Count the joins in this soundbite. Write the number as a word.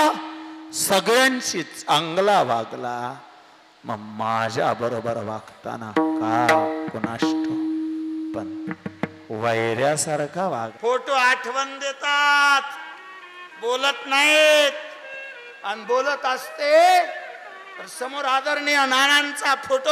one